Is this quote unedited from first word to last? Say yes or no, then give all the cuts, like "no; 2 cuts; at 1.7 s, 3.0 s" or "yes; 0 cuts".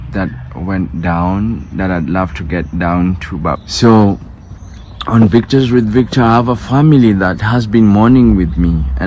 no; 1 cut; at 3.6 s